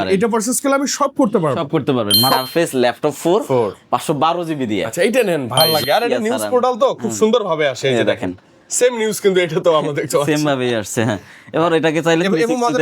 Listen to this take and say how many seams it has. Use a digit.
2